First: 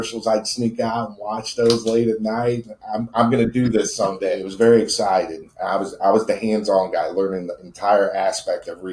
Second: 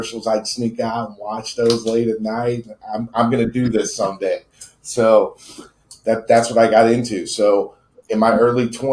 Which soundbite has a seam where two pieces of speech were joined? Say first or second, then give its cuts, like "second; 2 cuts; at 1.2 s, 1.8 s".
first; 1 cut; at 4.5 s